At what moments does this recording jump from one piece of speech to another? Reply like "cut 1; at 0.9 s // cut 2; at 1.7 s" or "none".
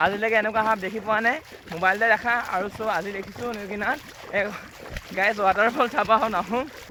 none